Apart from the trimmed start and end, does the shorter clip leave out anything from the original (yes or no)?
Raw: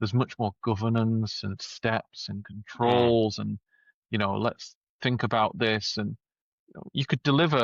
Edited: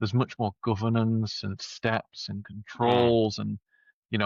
no